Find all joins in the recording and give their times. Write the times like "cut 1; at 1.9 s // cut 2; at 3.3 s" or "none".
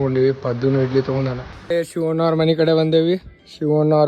cut 1; at 1.7 s